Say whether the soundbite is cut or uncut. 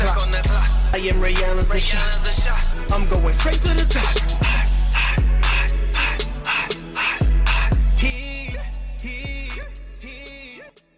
uncut